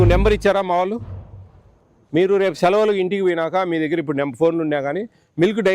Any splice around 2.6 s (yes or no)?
no